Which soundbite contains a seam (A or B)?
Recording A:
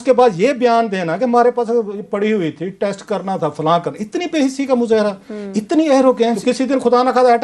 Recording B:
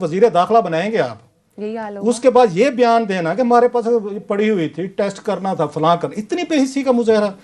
A